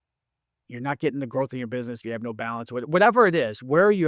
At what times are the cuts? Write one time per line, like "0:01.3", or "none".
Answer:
none